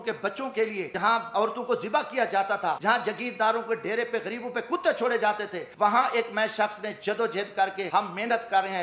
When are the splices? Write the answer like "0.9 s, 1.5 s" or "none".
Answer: 1.1 s, 2.8 s, 5.6 s, 7.8 s